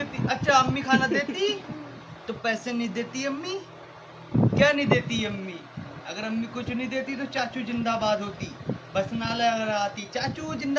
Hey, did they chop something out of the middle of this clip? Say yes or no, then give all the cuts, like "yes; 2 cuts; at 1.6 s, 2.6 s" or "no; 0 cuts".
no; 0 cuts